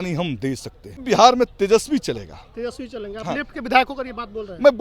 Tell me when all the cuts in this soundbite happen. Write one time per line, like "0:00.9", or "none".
0:01.0

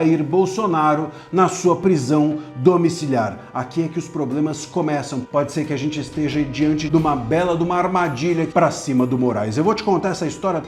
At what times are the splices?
0:05.2
0:06.8
0:08.5

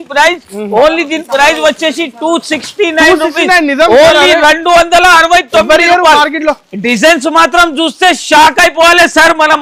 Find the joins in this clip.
none

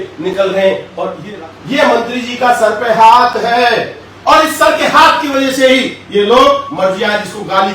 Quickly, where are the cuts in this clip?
0:01.2

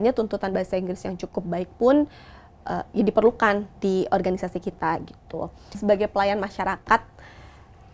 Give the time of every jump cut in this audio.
0:05.6

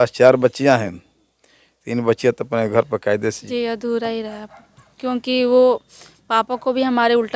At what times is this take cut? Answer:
0:03.4

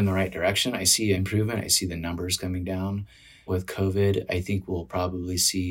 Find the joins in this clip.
0:01.2
0:03.4

